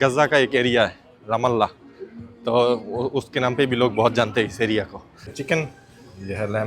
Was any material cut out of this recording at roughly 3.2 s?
no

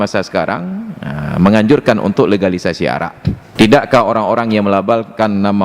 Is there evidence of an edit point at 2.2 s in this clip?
no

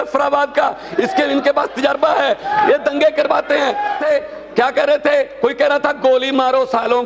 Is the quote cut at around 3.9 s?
yes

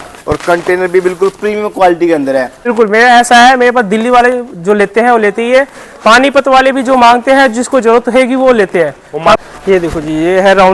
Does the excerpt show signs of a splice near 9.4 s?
yes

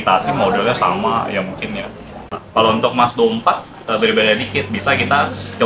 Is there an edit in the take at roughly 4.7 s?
no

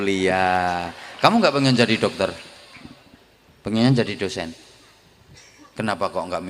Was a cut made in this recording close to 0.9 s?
no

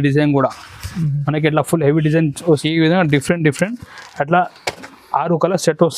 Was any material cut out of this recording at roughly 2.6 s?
yes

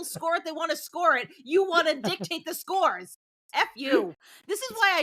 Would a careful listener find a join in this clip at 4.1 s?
yes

